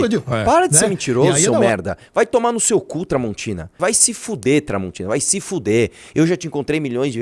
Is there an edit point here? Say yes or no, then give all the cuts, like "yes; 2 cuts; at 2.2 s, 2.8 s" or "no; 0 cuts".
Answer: yes; 1 cut; at 3.8 s